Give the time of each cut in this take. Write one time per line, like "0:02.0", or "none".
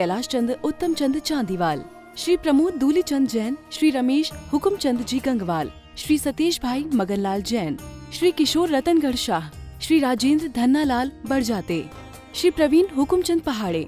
none